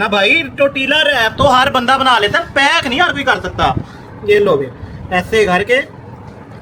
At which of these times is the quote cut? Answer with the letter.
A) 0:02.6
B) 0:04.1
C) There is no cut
C